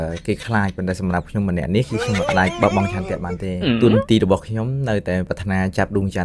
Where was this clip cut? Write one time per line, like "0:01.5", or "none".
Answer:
0:02.2
0:05.3